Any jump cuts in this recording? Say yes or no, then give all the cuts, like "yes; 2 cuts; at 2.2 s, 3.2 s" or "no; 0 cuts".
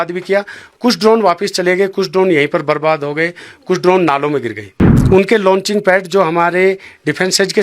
yes; 1 cut; at 5.0 s